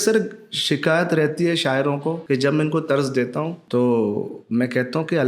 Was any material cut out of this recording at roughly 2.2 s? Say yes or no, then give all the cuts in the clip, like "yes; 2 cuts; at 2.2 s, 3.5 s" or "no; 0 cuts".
yes; 2 cuts; at 2.2 s, 3.6 s